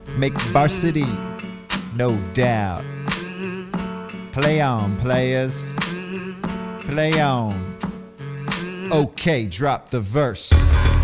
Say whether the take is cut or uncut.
uncut